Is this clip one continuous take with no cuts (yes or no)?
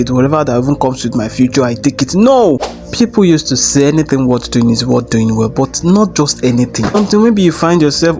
no